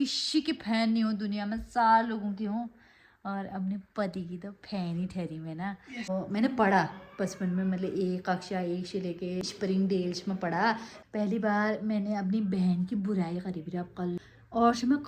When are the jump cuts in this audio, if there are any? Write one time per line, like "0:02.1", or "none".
0:06.1
0:09.4
0:10.9
0:14.2